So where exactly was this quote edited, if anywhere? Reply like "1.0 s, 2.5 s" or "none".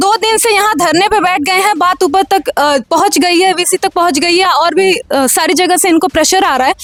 none

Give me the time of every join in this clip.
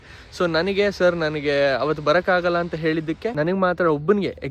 3.3 s

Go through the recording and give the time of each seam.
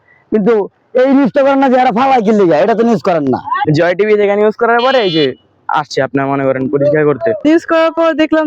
7.4 s

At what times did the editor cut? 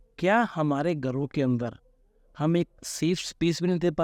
none

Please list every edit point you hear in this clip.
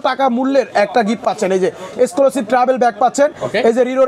none

